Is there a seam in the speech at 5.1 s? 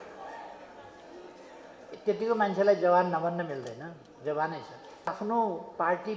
yes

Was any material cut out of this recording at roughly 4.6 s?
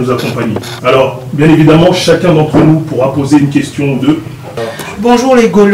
yes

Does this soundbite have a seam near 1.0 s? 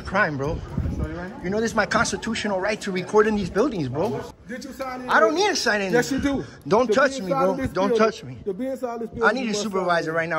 no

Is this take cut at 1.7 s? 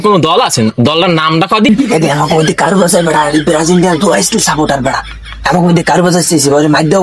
yes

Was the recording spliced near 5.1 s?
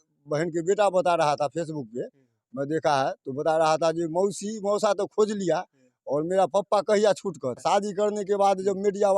no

